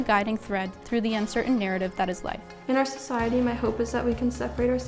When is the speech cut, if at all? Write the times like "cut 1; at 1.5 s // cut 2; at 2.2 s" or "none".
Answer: cut 1; at 2.5 s